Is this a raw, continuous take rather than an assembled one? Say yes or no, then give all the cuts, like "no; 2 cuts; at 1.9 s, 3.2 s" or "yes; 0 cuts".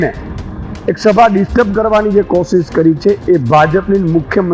yes; 0 cuts